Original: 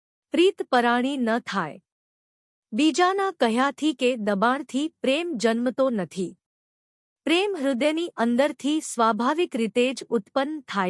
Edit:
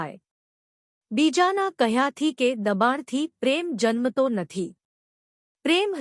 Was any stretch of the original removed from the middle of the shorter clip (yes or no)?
no